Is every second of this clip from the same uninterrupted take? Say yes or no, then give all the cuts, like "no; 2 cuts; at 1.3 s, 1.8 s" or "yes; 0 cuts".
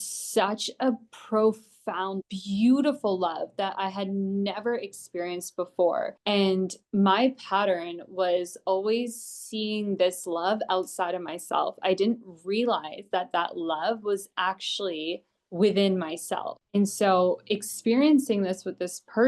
no; 2 cuts; at 2.2 s, 6.2 s